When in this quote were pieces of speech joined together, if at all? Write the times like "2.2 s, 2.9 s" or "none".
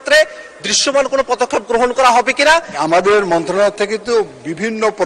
2.7 s